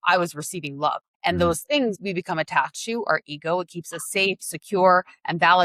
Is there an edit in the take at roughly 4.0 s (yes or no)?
no